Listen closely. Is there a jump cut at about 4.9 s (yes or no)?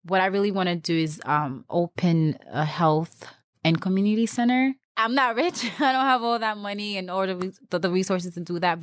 yes